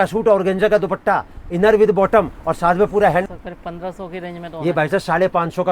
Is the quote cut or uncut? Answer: cut